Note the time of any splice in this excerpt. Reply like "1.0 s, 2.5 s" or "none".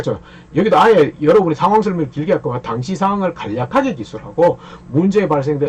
none